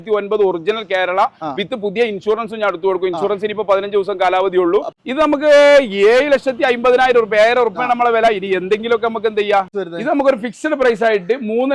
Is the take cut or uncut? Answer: cut